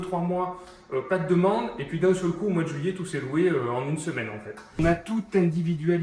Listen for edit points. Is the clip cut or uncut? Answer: cut